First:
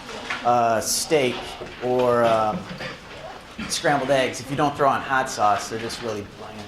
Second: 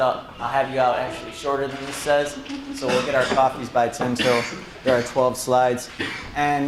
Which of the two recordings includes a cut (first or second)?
first